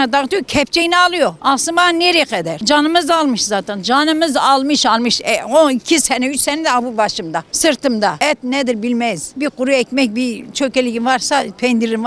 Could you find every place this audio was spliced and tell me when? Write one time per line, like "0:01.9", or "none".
0:01.4
0:02.5
0:07.5
0:08.2
0:09.3